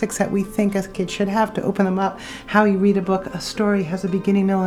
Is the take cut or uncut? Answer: uncut